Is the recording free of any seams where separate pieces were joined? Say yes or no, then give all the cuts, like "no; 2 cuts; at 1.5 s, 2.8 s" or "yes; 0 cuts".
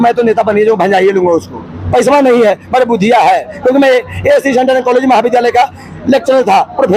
yes; 0 cuts